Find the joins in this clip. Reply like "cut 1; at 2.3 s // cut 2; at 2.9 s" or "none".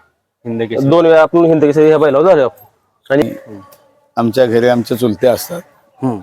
cut 1; at 3.2 s